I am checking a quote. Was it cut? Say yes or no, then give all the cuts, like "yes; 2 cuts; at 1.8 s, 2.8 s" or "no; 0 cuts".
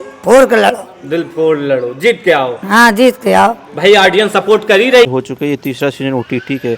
yes; 1 cut; at 5.1 s